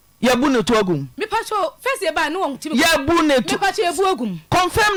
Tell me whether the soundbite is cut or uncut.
uncut